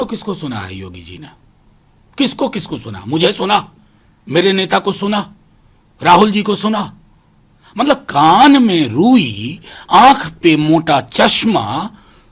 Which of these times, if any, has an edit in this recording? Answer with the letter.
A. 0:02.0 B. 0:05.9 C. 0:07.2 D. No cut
D